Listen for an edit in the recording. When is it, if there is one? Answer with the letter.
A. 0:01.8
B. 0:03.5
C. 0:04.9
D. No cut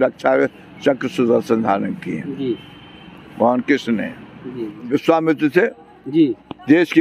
C